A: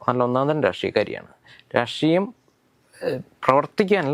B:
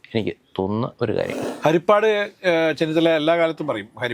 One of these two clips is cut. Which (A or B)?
B